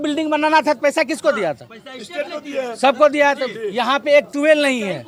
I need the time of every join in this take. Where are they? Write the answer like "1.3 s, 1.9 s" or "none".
none